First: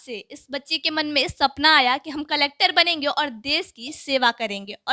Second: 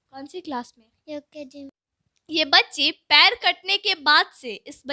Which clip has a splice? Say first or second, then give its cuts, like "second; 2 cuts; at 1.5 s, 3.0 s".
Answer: second; 1 cut; at 1.7 s